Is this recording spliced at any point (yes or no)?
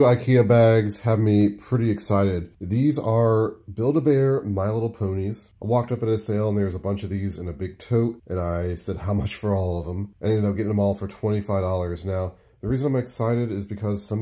no